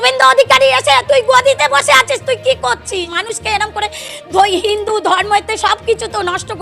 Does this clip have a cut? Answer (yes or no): yes